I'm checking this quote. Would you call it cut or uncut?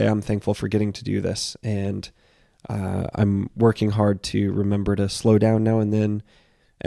uncut